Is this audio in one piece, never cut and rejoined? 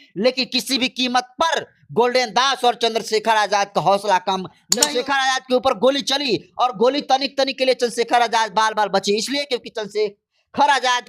no; 1 cut; at 4.7 s

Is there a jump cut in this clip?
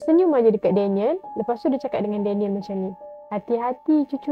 no; 0 cuts

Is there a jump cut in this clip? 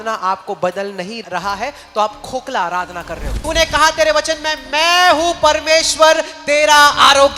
yes; 2 cuts; at 1.2 s, 3.3 s

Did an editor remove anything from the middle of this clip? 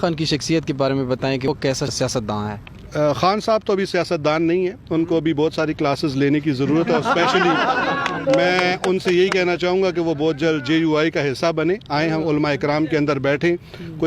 yes; 1 cut; at 1.5 s

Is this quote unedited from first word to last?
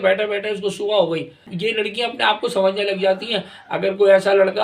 no; 1 cut; at 1.5 s

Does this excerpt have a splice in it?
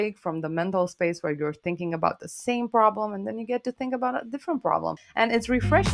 yes; 1 cut; at 5.0 s

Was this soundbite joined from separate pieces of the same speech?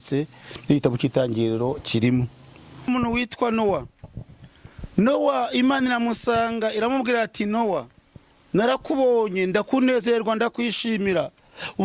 yes; 1 cut; at 2.9 s

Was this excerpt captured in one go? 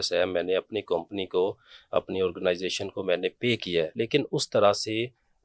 no; 1 cut; at 3.9 s

